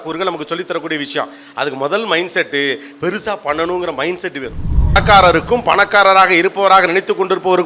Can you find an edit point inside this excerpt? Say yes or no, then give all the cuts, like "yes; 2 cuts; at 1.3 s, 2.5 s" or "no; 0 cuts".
yes; 1 cut; at 5.0 s